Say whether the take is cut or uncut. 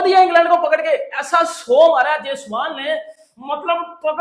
uncut